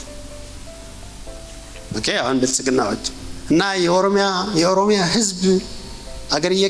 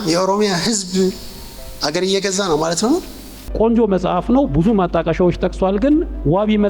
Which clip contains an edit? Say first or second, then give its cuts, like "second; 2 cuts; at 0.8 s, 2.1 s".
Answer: second; 1 cut; at 3.5 s